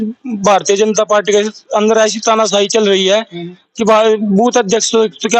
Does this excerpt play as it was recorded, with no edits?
yes; 0 cuts

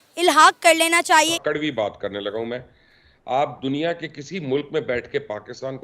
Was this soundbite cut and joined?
yes; 1 cut; at 1.4 s

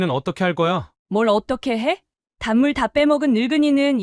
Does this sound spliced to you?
yes; 1 cut; at 0.9 s

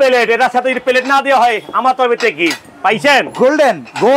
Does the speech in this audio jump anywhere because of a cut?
no; 0 cuts

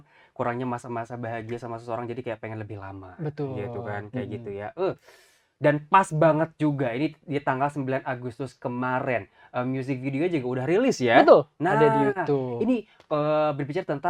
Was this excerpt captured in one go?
yes; 0 cuts

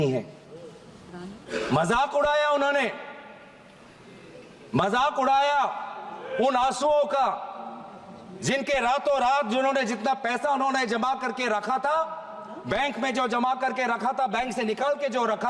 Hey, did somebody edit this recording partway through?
no; 0 cuts

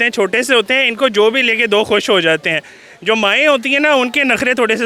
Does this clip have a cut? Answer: no; 0 cuts

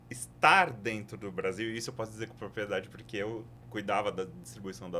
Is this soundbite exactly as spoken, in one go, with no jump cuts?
no; 1 cut; at 3.6 s

